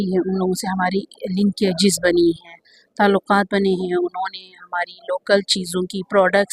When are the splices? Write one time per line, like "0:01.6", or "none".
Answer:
none